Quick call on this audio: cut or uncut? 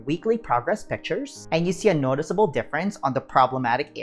uncut